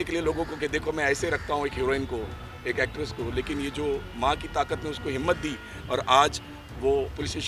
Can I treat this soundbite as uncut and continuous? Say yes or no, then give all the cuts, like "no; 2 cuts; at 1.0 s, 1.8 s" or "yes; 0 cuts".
yes; 0 cuts